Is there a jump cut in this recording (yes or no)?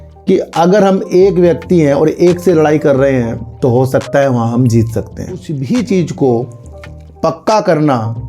yes